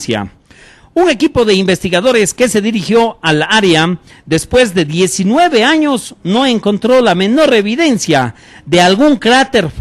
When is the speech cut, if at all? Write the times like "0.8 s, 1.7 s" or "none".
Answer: none